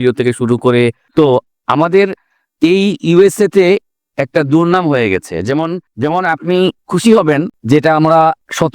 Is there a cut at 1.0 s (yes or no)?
yes